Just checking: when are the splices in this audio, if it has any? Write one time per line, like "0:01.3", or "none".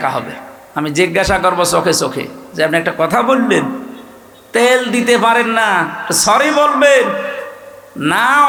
none